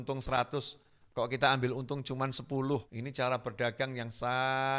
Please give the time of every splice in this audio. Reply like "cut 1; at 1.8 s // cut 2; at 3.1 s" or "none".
cut 1; at 3.0 s